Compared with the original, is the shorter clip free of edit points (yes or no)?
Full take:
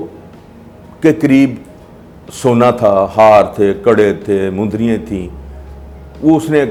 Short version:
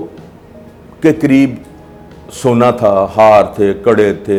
yes